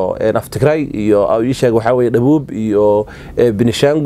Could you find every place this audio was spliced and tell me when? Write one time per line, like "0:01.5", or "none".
none